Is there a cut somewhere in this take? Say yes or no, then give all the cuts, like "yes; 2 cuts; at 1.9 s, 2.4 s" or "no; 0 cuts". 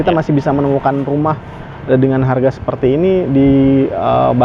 no; 0 cuts